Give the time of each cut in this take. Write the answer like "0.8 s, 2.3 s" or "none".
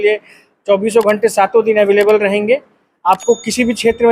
none